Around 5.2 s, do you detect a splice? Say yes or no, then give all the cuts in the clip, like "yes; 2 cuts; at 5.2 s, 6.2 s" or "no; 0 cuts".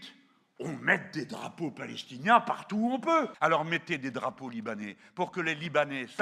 no; 1 cut; at 3.3 s